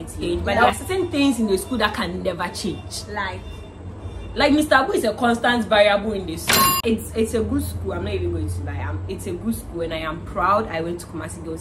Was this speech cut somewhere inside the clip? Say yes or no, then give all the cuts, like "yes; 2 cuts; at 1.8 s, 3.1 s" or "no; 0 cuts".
yes; 2 cuts; at 0.7 s, 6.8 s